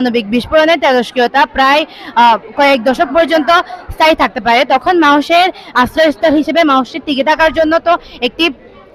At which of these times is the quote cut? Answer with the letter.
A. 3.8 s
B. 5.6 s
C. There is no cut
C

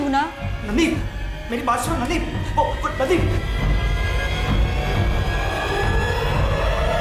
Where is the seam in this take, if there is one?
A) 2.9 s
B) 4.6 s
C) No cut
C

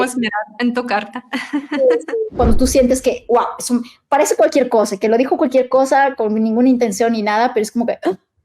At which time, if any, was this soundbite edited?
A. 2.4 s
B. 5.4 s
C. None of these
A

